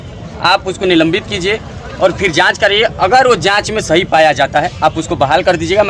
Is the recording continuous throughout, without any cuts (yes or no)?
yes